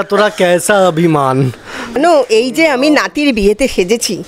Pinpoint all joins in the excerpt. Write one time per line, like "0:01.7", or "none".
0:02.0